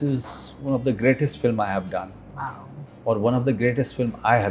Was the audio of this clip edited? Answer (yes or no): no